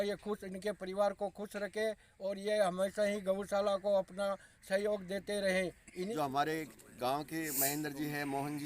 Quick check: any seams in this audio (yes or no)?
yes